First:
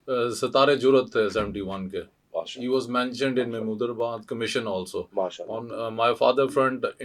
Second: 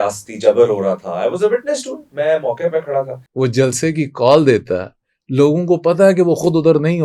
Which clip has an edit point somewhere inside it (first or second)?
second